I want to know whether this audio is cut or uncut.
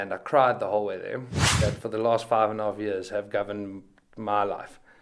cut